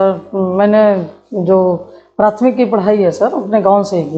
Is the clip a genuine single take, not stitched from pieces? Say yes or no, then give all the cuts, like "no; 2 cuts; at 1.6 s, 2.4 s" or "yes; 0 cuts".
yes; 0 cuts